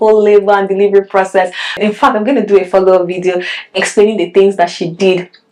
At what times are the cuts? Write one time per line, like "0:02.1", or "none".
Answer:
none